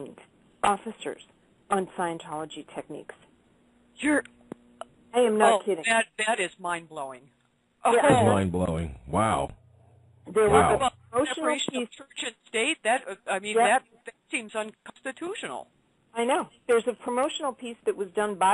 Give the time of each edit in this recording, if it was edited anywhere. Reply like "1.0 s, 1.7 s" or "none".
17.2 s